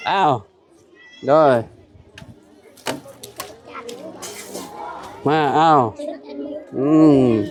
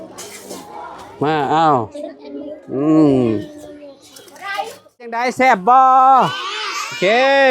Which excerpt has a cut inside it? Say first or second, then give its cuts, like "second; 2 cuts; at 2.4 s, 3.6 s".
second; 1 cut; at 5.3 s